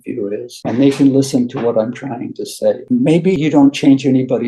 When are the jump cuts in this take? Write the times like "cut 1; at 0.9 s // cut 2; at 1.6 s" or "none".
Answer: cut 1; at 3.0 s